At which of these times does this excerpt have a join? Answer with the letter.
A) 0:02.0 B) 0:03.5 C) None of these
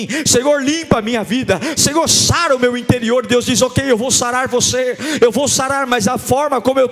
C